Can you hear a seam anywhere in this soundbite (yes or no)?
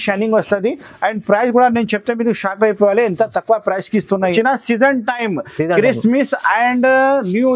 yes